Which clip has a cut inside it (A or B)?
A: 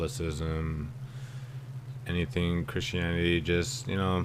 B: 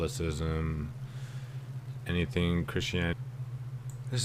A